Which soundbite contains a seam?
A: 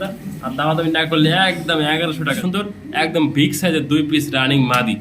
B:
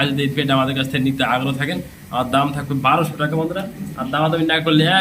A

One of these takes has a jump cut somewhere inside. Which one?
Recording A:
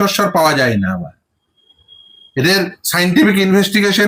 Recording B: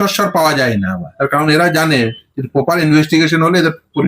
B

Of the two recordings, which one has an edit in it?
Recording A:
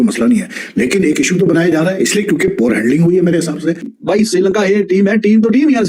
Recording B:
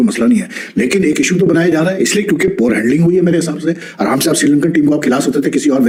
A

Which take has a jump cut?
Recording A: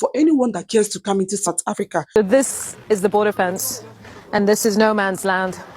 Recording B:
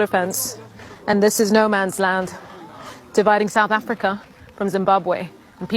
A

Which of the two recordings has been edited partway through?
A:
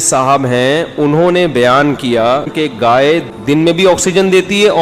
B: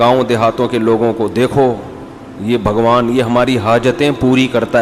A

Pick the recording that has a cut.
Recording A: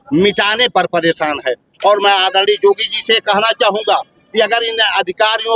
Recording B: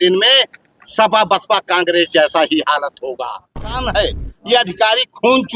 B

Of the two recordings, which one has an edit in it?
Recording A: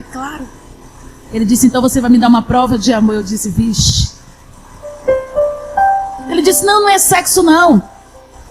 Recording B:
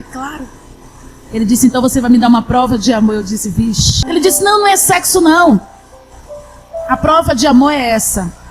B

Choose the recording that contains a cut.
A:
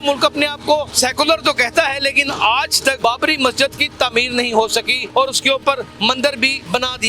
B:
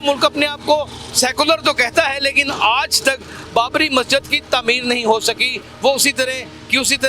A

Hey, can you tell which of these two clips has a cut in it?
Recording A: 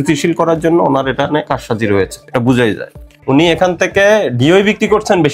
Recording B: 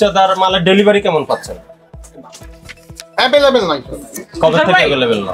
A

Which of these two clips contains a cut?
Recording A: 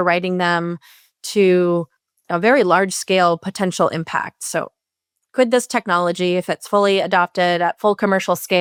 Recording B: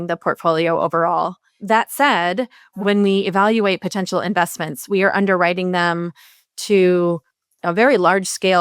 B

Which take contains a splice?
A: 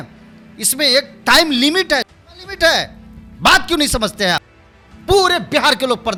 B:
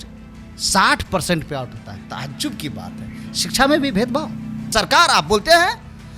B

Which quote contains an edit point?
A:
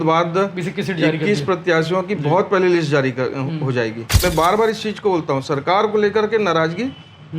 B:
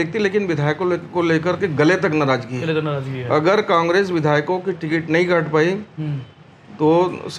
A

